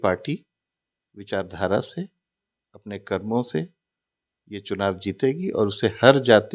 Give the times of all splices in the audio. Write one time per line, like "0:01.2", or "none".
none